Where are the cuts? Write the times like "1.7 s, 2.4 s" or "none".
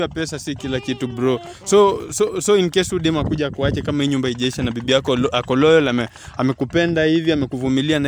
none